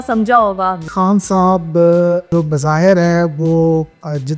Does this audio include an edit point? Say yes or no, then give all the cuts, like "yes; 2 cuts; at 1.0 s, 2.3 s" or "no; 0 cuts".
yes; 2 cuts; at 0.9 s, 2.3 s